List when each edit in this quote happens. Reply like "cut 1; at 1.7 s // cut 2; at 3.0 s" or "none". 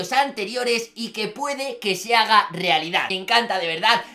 cut 1; at 3.1 s